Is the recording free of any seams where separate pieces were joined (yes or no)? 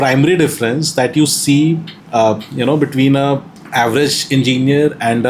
no